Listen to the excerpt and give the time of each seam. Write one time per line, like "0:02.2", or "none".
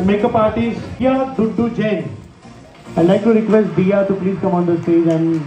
0:01.0